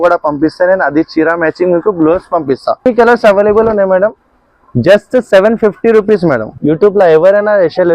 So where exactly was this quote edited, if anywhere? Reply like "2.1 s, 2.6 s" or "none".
2.9 s, 6.5 s